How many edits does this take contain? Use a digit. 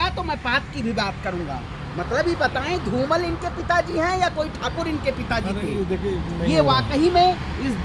0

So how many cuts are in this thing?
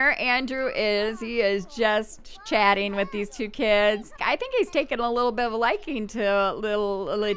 1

